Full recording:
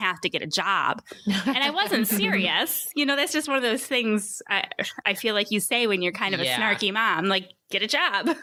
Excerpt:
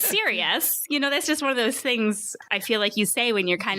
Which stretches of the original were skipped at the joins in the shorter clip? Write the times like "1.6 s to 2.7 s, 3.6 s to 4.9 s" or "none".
4.4 s to 4.9 s